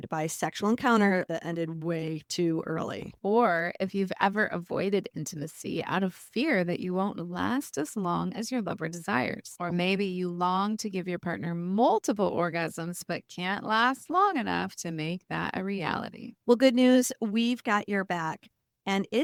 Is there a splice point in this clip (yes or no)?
no